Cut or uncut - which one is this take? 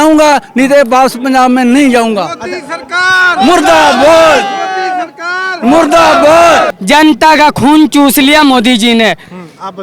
cut